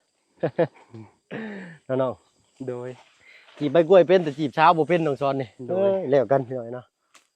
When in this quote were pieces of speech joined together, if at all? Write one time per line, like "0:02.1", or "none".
none